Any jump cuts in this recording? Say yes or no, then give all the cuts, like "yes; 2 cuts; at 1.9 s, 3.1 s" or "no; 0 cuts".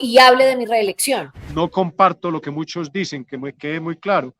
yes; 1 cut; at 1.4 s